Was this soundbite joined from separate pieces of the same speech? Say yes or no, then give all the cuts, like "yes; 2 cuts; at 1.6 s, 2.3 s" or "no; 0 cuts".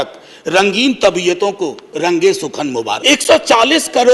yes; 1 cut; at 3.0 s